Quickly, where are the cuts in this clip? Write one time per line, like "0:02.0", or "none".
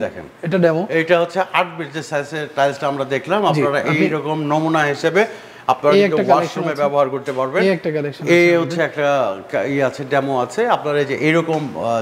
none